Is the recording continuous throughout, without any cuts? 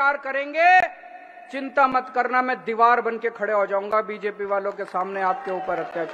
yes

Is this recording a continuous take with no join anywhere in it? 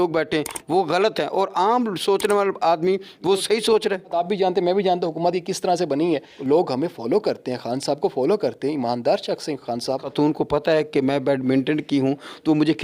no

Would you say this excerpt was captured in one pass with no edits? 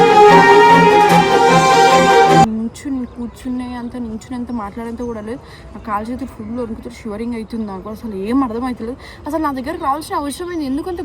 no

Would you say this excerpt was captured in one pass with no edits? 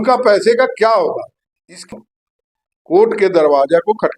no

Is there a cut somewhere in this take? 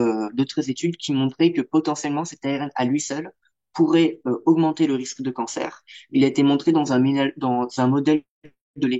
no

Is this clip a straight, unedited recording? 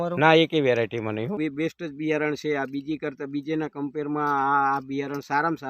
no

